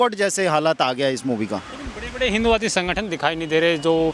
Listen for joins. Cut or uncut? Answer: uncut